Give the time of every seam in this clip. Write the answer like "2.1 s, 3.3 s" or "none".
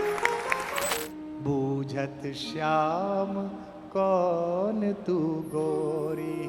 0.9 s